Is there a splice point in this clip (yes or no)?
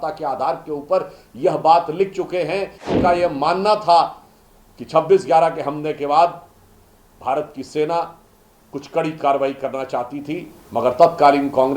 yes